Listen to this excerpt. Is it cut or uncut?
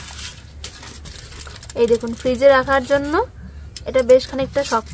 uncut